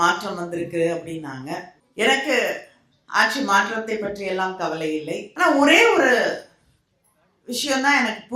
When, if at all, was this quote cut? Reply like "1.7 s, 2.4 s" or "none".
1.8 s, 5.3 s